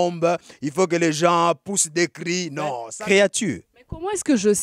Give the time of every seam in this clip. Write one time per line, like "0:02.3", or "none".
0:02.9